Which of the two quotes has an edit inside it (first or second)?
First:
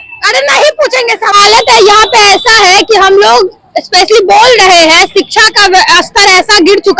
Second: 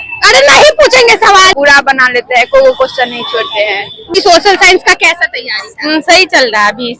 second